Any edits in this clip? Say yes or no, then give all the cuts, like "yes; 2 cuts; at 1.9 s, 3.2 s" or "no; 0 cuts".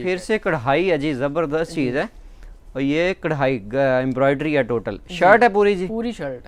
no; 0 cuts